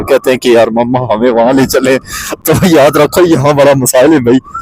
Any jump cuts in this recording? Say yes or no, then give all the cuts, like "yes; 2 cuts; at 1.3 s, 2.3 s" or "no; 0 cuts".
no; 0 cuts